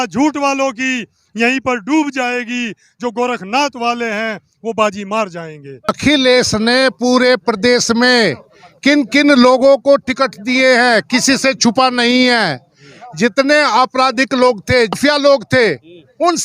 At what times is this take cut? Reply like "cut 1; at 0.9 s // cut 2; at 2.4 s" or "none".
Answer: cut 1; at 5.9 s // cut 2; at 15.0 s